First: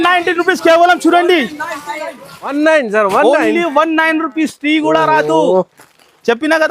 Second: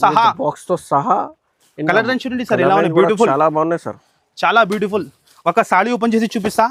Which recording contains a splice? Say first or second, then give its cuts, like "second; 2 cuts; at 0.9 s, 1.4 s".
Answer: first; 1 cut; at 2.5 s